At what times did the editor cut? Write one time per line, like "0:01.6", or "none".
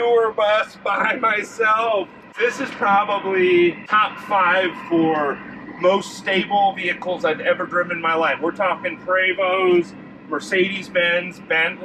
0:02.3
0:03.9